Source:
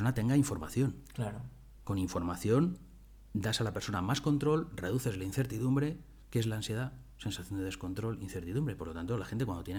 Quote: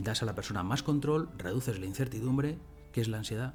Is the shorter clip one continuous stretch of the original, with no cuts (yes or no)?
yes